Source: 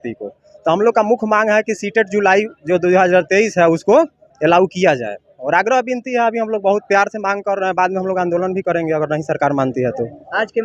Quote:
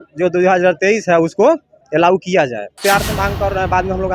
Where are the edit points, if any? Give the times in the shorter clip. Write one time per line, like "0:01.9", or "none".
0:02.8

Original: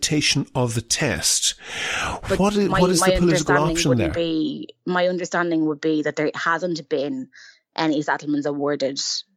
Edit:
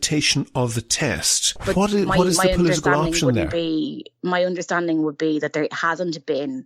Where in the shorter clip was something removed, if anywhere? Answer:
0:01.6

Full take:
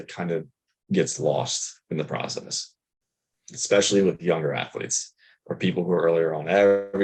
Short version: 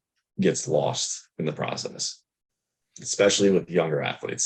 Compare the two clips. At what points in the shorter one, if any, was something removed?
none

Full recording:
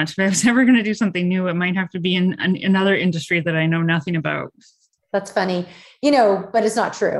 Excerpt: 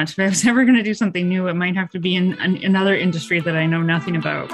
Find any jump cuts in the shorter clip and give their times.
none

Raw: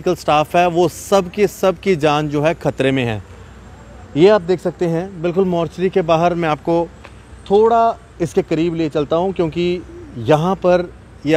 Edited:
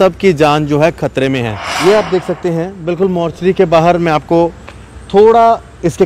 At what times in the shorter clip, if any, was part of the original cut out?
0:01.6

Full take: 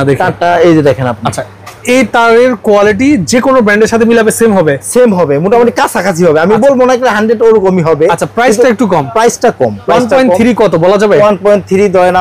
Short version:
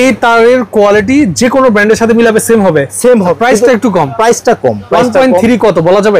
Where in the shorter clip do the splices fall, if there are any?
0:03.3

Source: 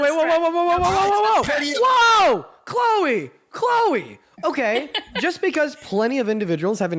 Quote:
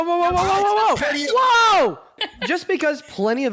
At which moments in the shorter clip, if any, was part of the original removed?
0:02.2

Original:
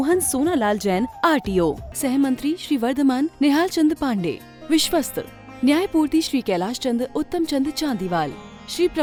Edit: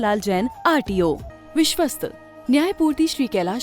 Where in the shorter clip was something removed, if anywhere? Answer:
0:01.3

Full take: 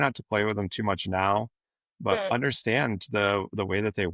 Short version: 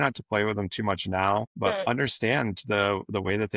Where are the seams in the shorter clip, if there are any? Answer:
0:01.8

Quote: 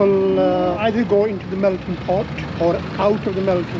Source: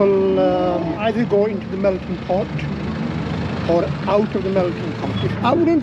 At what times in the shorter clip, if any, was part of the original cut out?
0:00.8
0:02.4

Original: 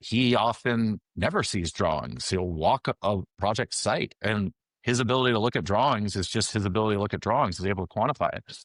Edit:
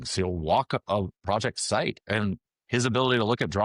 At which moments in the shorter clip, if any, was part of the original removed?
none

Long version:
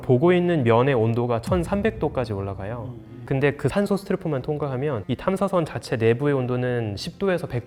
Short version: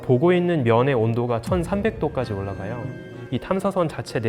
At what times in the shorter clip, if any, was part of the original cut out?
0:03.2

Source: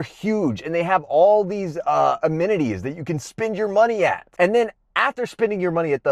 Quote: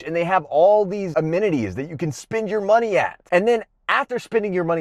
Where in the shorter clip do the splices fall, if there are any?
0:01.1

